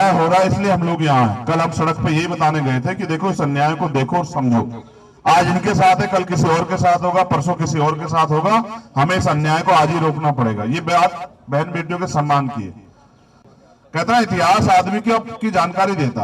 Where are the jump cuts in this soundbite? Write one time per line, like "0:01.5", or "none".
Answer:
0:13.4